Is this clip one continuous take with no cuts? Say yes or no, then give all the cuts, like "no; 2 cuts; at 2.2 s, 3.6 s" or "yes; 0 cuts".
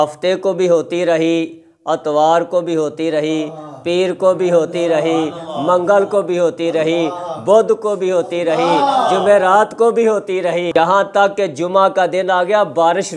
yes; 0 cuts